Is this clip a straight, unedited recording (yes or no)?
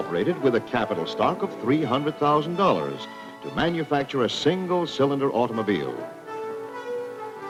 yes